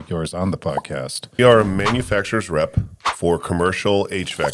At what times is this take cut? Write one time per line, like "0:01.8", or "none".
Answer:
0:01.4